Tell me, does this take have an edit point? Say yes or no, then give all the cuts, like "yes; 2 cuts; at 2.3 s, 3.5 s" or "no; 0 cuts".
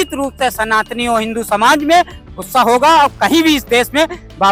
no; 0 cuts